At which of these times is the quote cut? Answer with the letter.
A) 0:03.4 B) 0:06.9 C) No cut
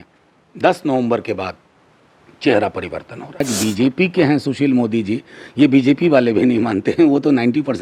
A